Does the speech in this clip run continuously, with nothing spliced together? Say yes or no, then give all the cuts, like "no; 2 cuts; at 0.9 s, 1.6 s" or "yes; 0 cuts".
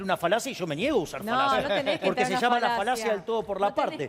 yes; 0 cuts